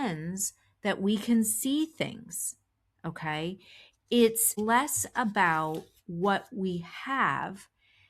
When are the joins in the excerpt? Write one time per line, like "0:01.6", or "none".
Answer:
0:04.6